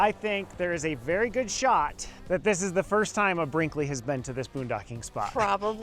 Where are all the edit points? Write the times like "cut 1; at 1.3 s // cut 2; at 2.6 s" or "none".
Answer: cut 1; at 2.2 s